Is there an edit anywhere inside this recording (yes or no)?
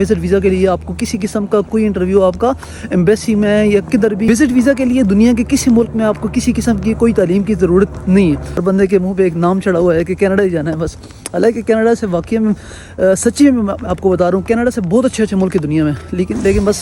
yes